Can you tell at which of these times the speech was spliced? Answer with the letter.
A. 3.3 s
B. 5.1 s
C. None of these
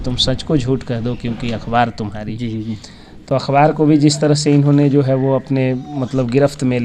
C